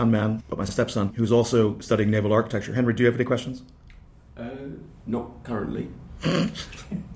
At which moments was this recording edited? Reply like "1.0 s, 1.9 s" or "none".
1.0 s